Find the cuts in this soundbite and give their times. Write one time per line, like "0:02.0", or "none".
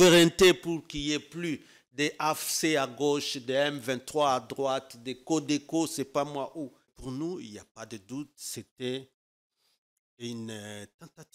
0:07.0